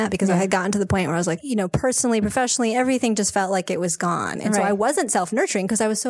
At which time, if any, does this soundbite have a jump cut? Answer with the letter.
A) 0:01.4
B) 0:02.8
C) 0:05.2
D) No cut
A